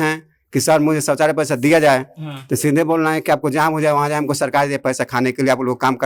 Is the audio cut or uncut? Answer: uncut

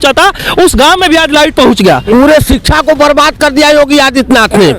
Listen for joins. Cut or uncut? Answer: cut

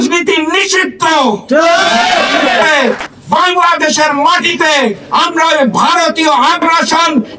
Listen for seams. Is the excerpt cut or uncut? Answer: cut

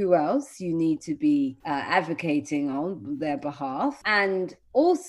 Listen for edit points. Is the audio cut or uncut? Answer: cut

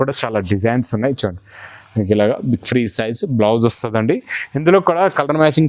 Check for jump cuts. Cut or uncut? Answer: uncut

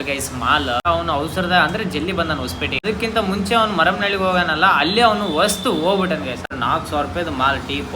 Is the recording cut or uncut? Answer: cut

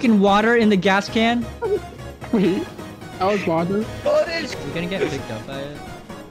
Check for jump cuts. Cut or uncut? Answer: cut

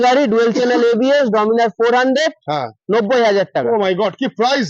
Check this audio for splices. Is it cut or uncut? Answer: uncut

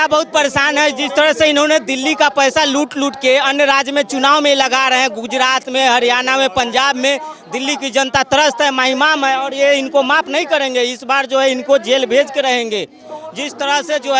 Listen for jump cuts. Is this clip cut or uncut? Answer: uncut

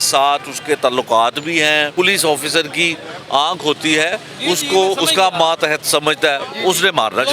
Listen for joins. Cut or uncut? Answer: cut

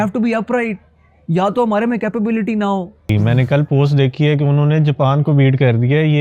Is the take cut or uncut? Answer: cut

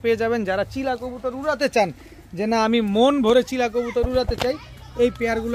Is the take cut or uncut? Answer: uncut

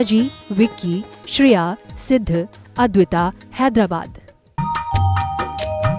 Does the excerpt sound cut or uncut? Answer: cut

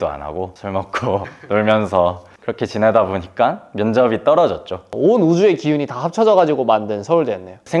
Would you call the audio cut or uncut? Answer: uncut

